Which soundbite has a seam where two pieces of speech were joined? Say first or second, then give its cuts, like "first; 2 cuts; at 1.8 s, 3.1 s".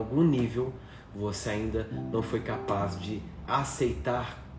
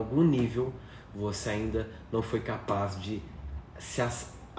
first; 1 cut; at 3.4 s